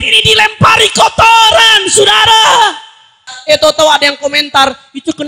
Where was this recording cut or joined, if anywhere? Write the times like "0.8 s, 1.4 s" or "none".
3.3 s